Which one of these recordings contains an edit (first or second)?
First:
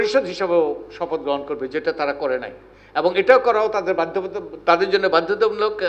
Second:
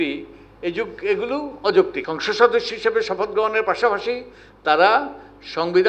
second